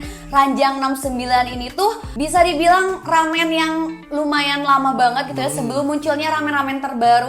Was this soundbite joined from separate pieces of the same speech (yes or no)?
yes